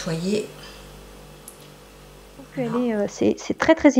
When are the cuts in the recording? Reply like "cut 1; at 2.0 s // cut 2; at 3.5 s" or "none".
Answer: cut 1; at 2.5 s